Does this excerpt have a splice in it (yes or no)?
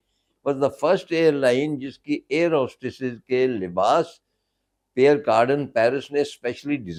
no